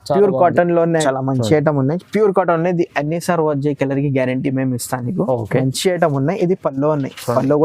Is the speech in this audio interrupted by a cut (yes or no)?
yes